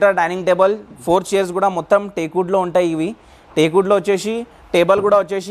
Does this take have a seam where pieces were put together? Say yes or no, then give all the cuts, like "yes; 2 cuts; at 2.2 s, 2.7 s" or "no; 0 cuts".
no; 0 cuts